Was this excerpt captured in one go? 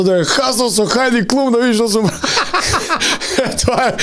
yes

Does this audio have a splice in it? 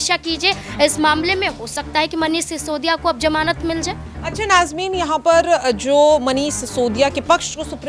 no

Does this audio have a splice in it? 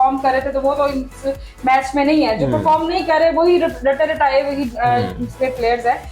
no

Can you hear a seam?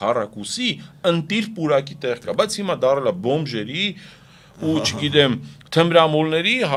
no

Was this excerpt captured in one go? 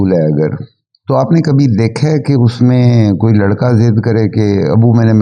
yes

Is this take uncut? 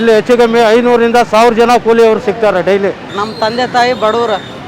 no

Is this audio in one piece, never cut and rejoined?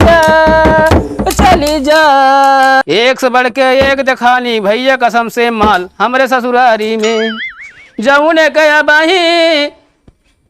no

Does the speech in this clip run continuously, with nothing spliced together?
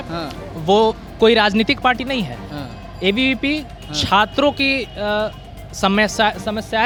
yes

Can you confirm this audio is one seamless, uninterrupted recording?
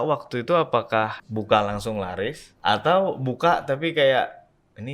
no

